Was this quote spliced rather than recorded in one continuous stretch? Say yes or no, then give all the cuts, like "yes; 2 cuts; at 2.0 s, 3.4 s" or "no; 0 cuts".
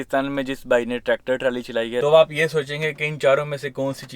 yes; 1 cut; at 2.0 s